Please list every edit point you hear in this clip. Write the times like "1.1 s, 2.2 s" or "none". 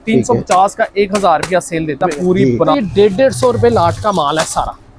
2.4 s